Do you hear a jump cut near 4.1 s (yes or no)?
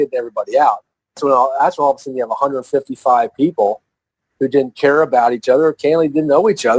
no